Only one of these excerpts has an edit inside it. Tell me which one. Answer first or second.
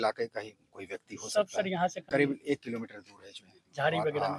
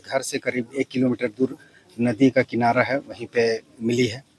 first